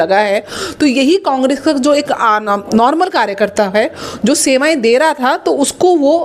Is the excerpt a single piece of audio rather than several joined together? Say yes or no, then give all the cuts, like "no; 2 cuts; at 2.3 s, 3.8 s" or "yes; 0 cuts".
yes; 0 cuts